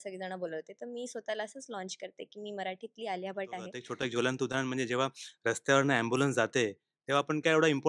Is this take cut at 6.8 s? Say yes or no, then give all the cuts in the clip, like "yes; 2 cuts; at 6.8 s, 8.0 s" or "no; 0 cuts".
no; 1 cut; at 3.8 s